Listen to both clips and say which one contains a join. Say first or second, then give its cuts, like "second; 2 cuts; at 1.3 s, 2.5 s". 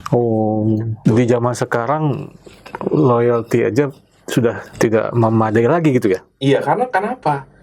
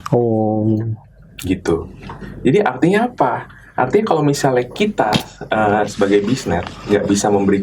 first; 2 cuts; at 1.0 s, 4.7 s